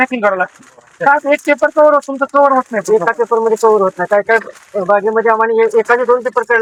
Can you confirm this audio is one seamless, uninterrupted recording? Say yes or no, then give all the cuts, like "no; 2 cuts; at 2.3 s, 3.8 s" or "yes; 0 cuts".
yes; 0 cuts